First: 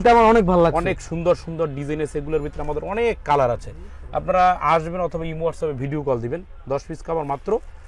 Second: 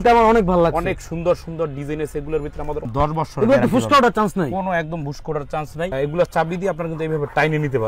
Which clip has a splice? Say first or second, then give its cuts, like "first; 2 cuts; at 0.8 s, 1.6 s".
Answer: second; 1 cut; at 2.9 s